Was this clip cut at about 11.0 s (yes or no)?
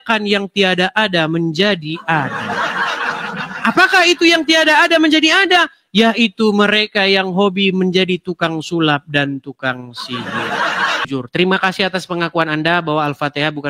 yes